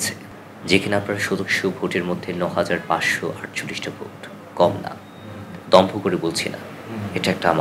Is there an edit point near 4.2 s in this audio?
no; 0 cuts

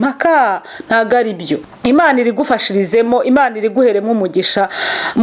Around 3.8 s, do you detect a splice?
no; 1 cut; at 1.7 s

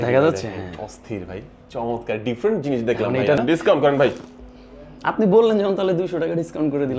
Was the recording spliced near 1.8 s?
no; 1 cut; at 3.4 s

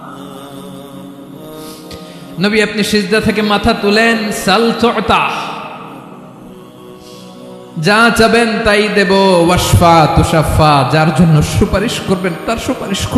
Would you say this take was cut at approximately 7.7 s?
yes; 3 cuts; at 2.1 s, 6.2 s, 7.7 s

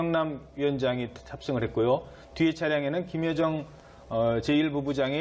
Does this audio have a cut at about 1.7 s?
yes; 1 cut; at 1.7 s

